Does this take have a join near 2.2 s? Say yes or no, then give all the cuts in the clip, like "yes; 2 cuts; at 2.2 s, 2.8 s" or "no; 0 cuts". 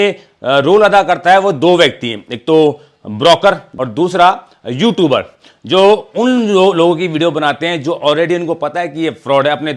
no; 1 cut; at 3.7 s